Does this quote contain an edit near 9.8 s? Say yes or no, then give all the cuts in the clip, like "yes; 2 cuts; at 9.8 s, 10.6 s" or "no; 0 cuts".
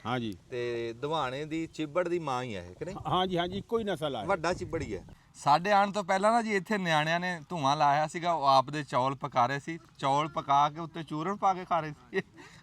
no; 1 cut; at 5.1 s